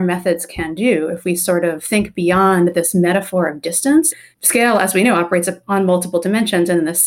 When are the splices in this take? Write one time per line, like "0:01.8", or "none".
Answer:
0:04.1